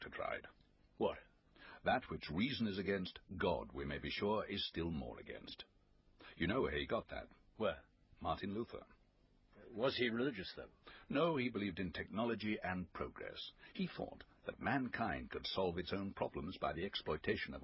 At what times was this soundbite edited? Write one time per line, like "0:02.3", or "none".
none